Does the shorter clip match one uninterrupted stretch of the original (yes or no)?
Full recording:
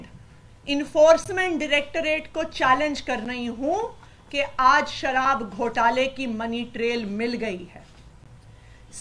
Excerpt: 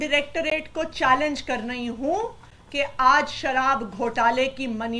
yes